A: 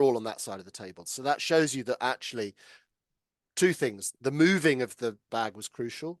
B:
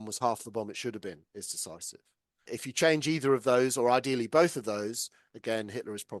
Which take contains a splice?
A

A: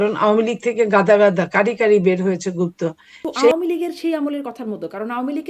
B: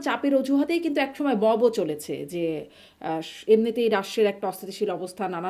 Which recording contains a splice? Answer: A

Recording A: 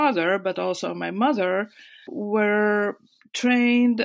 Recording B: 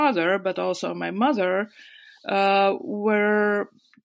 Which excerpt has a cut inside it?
A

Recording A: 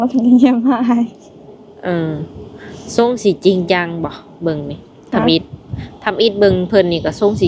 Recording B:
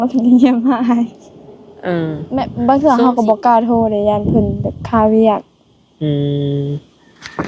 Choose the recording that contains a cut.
B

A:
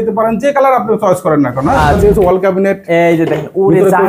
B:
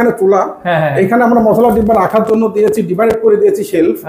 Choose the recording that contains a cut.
A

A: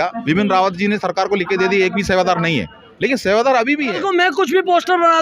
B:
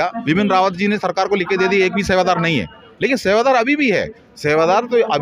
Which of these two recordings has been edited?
A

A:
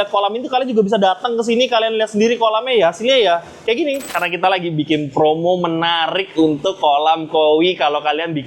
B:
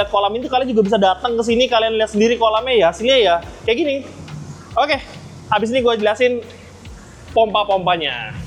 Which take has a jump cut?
A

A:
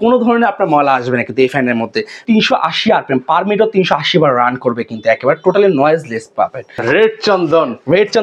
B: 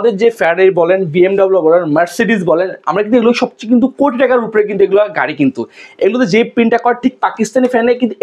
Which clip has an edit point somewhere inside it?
A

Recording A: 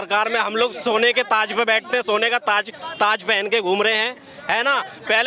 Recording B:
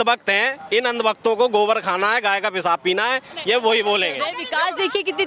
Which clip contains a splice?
B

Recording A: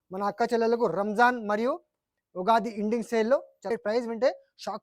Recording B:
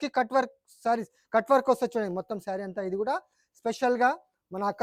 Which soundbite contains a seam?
A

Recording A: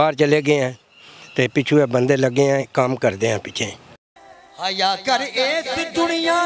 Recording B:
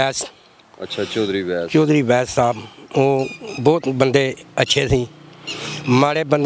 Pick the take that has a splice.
A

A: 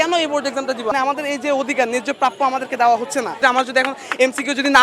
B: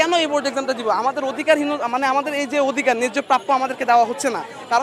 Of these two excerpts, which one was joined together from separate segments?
A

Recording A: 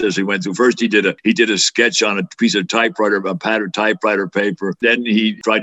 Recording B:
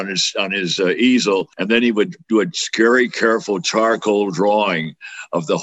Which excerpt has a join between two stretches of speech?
A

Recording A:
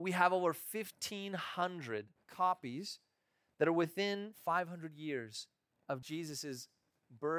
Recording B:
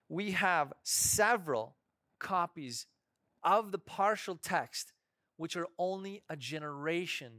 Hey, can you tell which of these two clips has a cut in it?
A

